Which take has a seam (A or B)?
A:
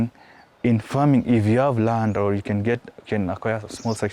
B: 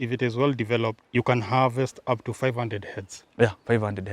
B